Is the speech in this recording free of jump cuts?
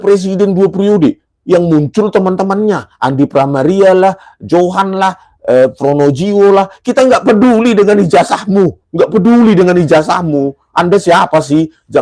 no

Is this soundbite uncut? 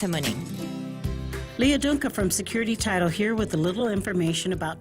no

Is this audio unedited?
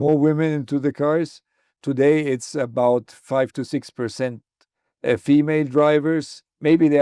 yes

